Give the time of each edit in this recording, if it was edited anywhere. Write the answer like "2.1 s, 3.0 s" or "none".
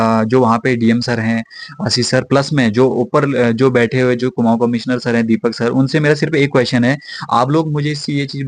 none